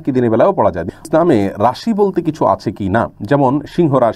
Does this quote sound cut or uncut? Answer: cut